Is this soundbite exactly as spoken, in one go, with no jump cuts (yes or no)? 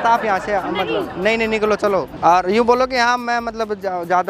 no